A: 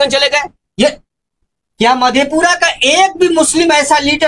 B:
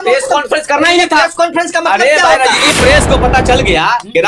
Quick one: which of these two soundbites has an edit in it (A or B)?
B